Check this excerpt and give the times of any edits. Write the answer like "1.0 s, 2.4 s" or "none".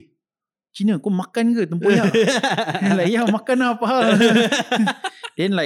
none